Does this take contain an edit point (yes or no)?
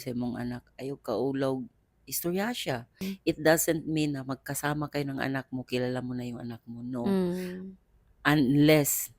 yes